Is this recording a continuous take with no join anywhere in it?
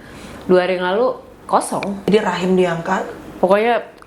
no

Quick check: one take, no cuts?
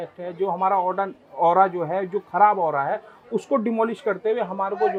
yes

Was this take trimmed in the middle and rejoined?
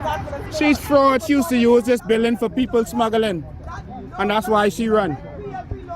yes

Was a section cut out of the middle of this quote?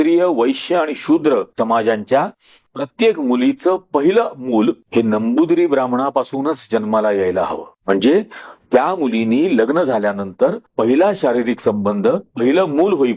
yes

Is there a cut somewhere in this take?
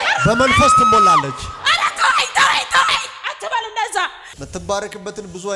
yes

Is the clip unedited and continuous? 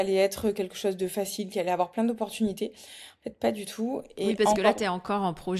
yes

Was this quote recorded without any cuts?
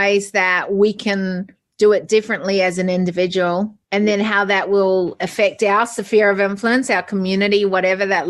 no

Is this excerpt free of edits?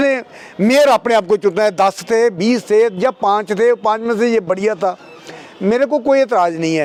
yes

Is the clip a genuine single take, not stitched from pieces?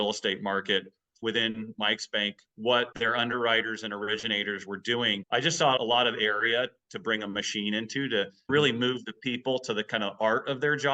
no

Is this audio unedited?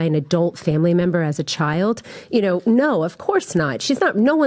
yes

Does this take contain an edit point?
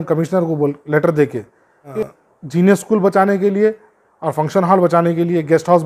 yes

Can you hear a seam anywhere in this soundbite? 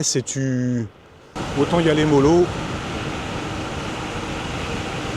yes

